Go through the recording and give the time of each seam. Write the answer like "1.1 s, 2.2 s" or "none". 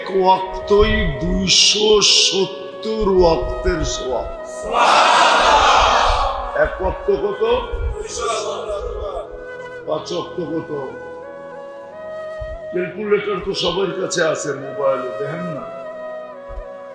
10.9 s, 12.7 s, 15.8 s